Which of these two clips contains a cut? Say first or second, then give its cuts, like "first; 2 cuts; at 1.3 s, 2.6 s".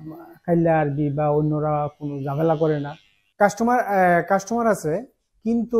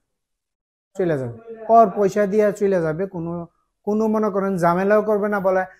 first; 1 cut; at 3.2 s